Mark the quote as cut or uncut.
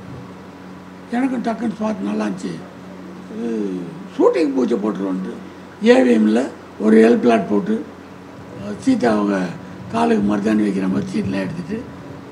uncut